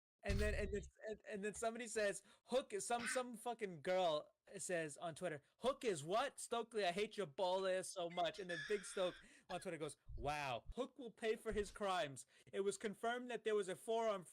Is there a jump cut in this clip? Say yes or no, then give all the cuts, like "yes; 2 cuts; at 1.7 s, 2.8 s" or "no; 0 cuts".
no; 0 cuts